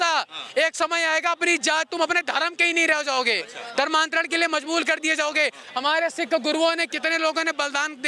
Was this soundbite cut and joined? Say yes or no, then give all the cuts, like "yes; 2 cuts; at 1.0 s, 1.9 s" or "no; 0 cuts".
no; 0 cuts